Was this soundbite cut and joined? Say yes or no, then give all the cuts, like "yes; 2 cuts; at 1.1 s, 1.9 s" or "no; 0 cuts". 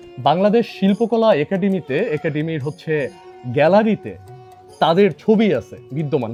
no; 0 cuts